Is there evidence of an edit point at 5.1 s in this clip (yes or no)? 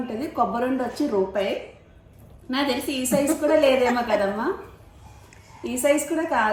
no